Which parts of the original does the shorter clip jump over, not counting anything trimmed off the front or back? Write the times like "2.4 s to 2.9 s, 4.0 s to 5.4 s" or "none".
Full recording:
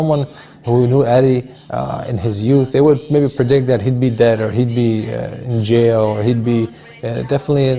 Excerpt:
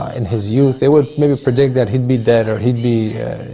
none